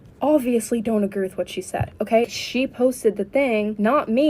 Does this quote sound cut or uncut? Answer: cut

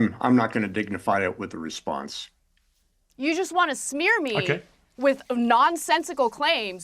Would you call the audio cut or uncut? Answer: cut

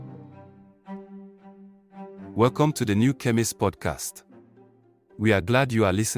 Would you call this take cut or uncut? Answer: uncut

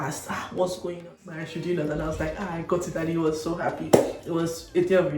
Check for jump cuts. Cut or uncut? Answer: cut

